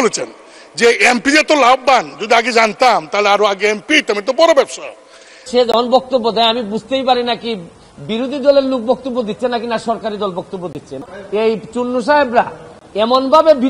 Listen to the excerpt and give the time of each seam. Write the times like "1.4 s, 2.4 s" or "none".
5.5 s, 10.9 s